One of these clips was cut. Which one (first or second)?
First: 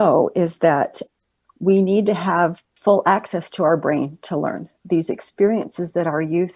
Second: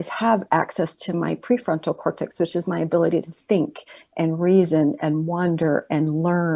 first